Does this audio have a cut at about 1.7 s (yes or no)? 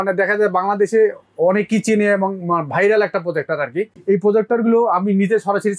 no